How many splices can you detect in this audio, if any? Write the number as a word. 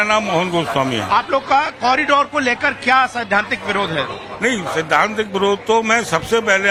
zero